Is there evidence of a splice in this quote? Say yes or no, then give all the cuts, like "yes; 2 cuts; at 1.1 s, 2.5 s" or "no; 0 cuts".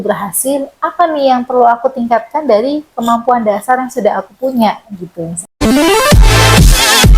yes; 1 cut; at 5.6 s